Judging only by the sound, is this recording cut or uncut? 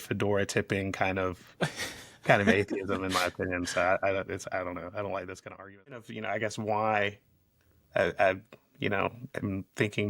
cut